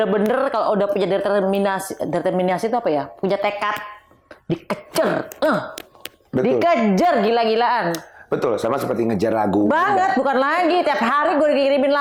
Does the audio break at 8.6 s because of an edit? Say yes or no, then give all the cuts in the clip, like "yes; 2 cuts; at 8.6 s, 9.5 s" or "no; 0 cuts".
no; 0 cuts